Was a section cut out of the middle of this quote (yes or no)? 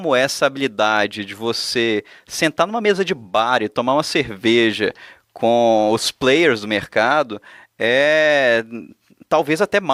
no